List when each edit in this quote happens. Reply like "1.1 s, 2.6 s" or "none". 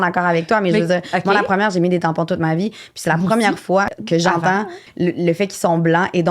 4.0 s, 4.8 s